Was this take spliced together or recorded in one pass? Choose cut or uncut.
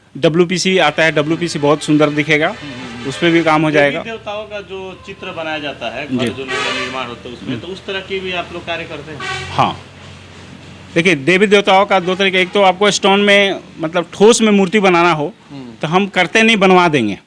uncut